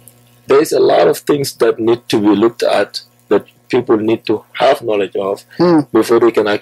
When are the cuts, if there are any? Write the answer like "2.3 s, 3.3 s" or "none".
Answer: none